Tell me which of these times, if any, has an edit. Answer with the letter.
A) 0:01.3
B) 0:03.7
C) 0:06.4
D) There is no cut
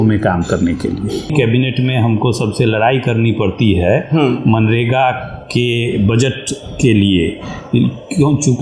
A